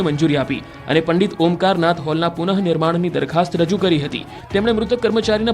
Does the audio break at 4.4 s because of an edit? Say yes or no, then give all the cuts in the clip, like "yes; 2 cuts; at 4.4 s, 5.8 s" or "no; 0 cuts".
no; 1 cut; at 2.4 s